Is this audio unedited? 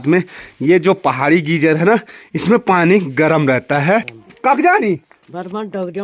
no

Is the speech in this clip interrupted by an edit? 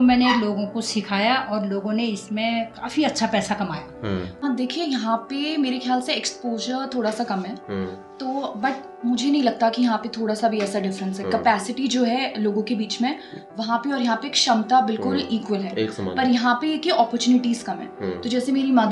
yes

